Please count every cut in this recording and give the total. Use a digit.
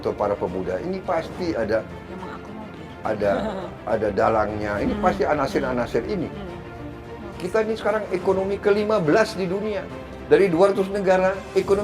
1